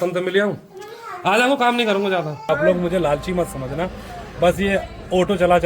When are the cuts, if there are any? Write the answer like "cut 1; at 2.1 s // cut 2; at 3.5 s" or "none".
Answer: cut 1; at 2.5 s